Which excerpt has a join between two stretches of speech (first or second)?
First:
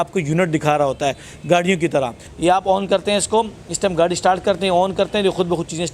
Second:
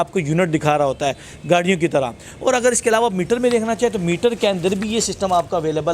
first